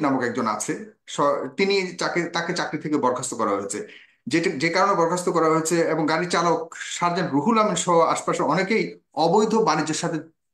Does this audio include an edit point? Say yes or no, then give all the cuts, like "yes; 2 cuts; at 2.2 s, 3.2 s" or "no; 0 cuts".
no; 0 cuts